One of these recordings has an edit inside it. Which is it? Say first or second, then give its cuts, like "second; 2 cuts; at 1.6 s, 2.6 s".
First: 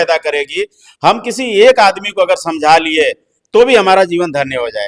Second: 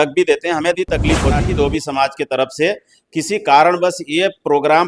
second; 1 cut; at 1.5 s